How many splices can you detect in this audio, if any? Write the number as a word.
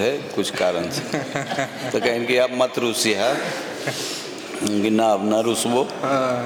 zero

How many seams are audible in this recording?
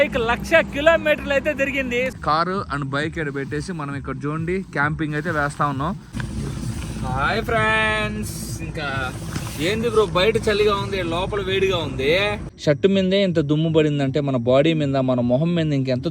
three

